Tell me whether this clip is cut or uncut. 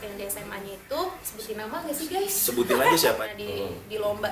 cut